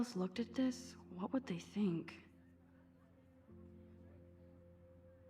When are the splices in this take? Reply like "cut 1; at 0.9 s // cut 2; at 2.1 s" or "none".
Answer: cut 1; at 2.2 s